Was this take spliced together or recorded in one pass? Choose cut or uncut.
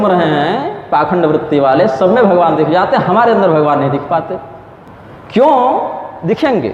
uncut